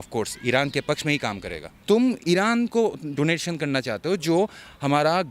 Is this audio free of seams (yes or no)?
no